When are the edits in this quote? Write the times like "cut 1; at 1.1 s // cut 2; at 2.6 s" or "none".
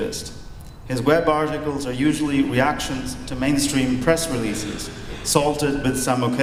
none